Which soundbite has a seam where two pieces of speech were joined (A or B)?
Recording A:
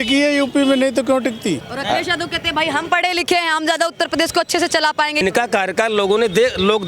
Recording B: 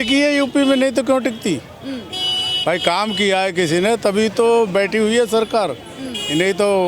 A